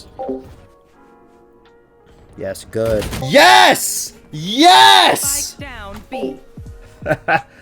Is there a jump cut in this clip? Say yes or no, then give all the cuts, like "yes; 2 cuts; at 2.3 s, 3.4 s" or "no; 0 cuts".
yes; 1 cut; at 3.2 s